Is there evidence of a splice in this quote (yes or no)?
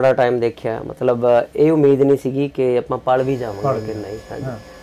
no